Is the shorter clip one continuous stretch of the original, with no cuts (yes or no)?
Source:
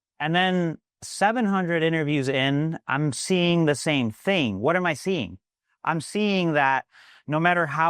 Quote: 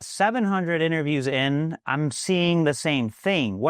yes